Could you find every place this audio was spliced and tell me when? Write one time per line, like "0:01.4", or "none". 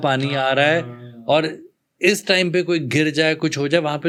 none